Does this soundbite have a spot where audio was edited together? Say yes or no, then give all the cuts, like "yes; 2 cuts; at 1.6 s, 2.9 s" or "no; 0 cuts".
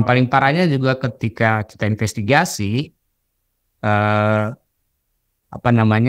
no; 0 cuts